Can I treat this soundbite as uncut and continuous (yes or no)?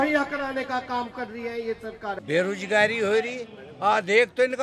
no